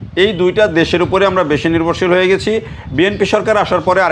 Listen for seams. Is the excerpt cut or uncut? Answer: uncut